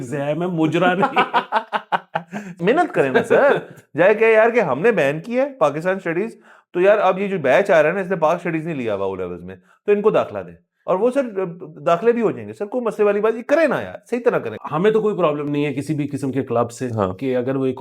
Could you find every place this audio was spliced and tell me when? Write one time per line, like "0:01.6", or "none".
0:02.6
0:14.6